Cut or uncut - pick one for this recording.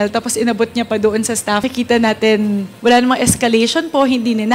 cut